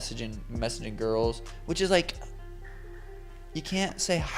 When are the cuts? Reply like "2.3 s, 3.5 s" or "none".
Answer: 1.5 s

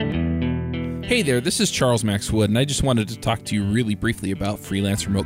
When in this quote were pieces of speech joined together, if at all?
1.0 s

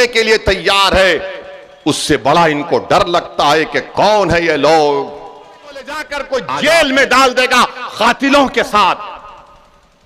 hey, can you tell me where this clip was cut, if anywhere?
5.9 s

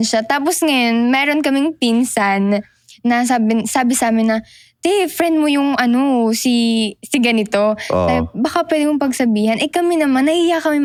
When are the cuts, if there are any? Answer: none

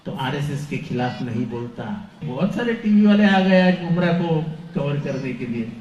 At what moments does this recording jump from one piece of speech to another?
2.2 s

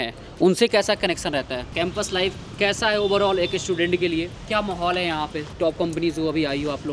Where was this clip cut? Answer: 1.7 s, 4.4 s, 5.5 s

